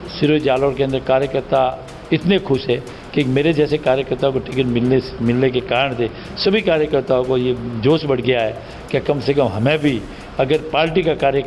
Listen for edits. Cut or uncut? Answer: uncut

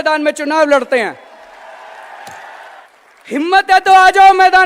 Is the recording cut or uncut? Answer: cut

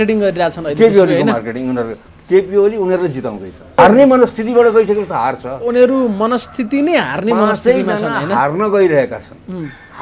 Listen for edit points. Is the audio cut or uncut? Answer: cut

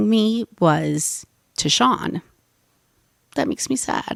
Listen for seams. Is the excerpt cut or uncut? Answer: uncut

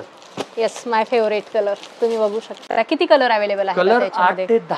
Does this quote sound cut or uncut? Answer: cut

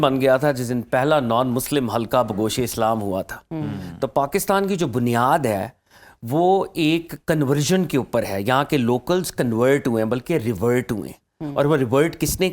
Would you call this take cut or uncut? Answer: uncut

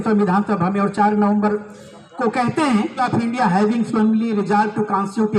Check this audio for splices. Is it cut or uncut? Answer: cut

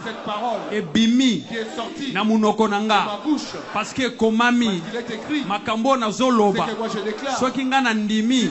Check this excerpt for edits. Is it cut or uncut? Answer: uncut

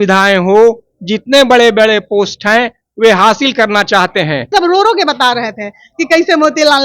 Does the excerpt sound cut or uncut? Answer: cut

